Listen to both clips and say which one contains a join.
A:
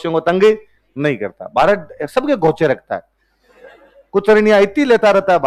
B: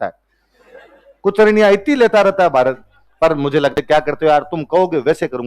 B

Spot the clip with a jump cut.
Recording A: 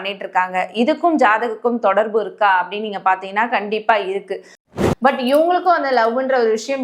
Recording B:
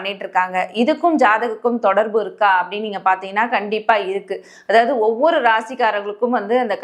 A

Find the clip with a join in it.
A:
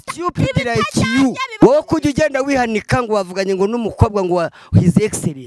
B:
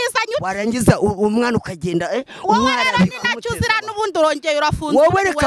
A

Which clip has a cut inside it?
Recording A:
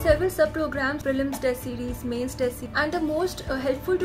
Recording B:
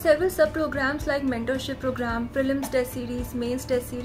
A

